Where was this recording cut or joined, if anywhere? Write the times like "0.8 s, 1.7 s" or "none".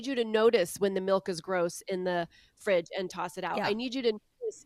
none